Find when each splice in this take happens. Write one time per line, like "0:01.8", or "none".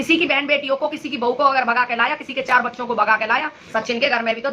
0:03.6